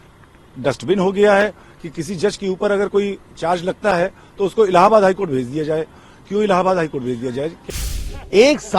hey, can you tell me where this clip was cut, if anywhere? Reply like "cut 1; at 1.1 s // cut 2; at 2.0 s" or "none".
cut 1; at 7.6 s